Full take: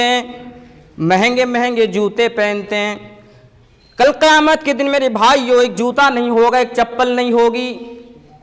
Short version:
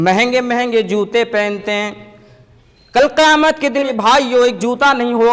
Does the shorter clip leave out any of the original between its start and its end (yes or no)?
yes